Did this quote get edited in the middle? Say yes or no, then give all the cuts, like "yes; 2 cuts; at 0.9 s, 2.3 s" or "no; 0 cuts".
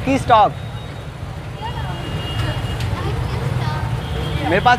no; 0 cuts